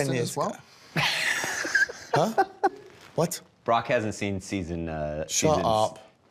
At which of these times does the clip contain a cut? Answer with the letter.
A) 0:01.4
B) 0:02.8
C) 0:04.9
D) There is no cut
B